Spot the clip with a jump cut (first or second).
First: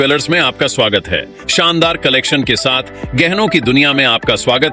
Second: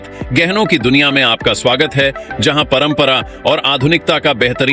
first